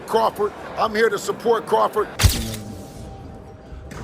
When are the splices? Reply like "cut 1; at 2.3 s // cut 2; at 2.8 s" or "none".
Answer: cut 1; at 2.2 s